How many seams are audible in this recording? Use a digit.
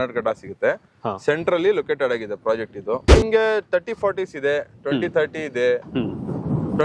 1